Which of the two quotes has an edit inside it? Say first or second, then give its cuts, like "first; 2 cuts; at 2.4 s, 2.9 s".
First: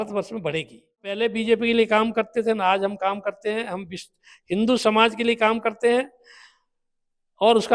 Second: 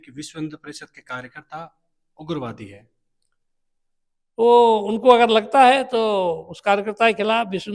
first; 1 cut; at 1.2 s